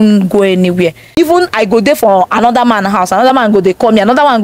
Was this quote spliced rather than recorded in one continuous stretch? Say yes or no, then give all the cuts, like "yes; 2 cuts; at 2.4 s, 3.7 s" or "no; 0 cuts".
yes; 1 cut; at 1.2 s